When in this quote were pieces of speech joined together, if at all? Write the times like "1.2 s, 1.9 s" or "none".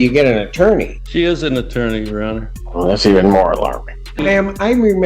1.0 s, 2.6 s, 4.2 s